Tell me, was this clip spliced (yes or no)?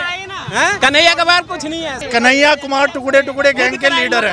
yes